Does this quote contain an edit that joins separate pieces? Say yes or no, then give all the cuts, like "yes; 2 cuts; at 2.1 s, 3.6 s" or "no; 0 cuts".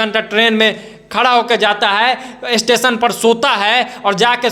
no; 0 cuts